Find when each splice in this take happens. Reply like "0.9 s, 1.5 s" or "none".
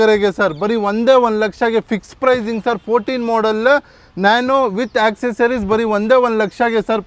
none